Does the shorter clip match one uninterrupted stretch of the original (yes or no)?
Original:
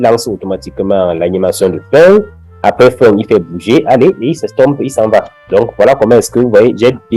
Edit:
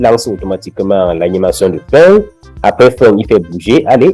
yes